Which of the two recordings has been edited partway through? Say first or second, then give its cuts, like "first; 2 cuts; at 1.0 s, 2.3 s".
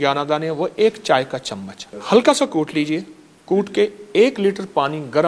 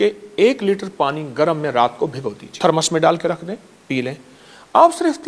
second; 1 cut; at 2.5 s